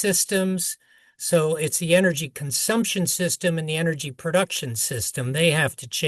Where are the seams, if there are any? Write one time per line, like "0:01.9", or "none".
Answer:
none